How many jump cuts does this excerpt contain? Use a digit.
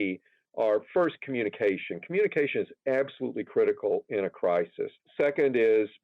1